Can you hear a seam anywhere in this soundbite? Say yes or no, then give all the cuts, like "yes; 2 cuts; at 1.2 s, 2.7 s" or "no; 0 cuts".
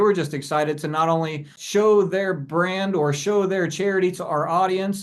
yes; 1 cut; at 1.6 s